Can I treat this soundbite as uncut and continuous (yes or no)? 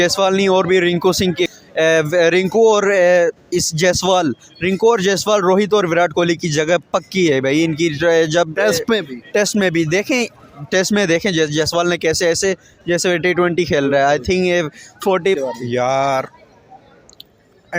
no